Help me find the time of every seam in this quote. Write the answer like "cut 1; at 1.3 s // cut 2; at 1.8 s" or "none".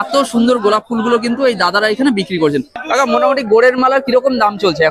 cut 1; at 2.7 s